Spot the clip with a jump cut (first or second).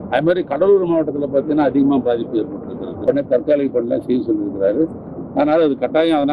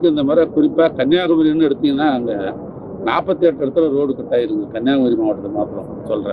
first